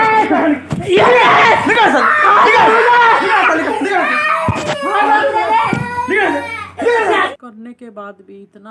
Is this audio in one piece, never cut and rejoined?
no; 1 cut; at 7.3 s

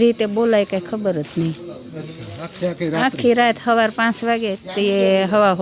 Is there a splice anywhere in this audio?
no; 0 cuts

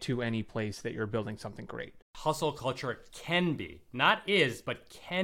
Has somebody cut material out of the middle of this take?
yes; 1 cut; at 2.1 s

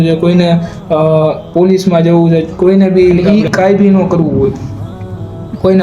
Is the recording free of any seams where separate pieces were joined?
no; 1 cut; at 3.2 s

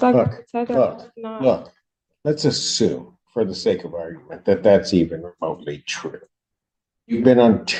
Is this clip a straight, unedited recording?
yes; 0 cuts

